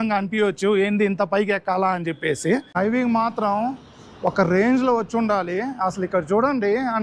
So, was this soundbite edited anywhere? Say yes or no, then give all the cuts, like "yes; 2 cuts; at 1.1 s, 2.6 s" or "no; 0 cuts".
yes; 1 cut; at 2.8 s